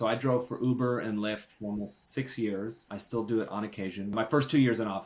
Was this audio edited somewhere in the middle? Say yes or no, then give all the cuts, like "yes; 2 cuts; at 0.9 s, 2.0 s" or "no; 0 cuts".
yes; 2 cuts; at 2.9 s, 4.1 s